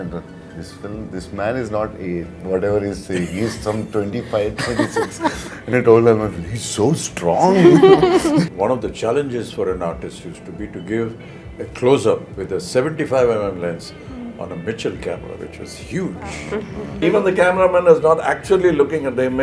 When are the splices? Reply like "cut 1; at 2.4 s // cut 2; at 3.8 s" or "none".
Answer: cut 1; at 8.5 s // cut 2; at 17.0 s